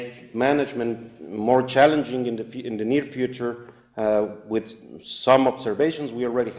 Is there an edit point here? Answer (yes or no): yes